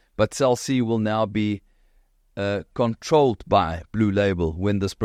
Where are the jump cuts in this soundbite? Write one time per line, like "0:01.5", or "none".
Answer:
none